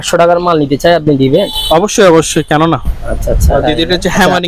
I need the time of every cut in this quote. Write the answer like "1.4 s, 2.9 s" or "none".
3.4 s

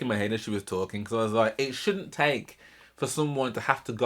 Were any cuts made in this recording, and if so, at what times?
none

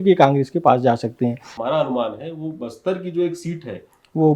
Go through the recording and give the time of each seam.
1.5 s

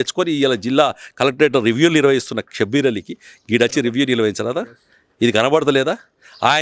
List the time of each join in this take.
none

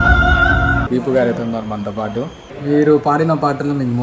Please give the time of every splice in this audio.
0.8 s, 2.5 s

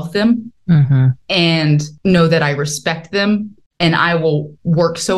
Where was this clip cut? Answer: 3.6 s

